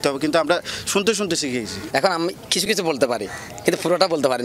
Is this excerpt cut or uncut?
uncut